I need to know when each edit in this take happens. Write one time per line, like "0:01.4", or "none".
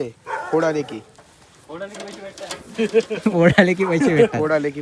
none